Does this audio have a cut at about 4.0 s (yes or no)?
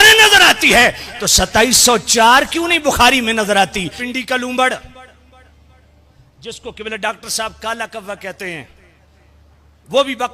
yes